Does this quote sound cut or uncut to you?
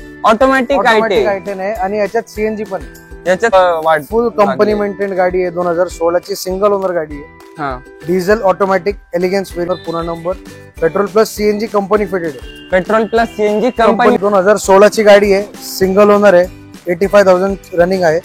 cut